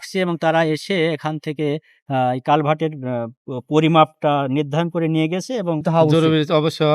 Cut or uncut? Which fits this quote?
cut